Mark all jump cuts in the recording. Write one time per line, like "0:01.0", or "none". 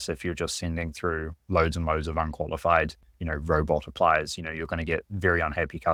none